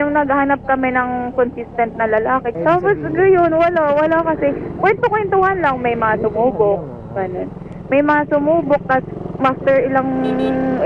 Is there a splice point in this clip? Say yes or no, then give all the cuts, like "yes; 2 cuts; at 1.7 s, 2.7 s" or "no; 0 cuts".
no; 0 cuts